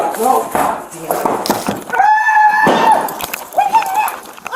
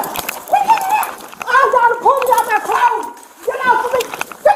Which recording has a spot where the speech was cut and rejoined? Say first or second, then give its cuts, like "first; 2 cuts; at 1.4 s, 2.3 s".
first; 1 cut; at 1.4 s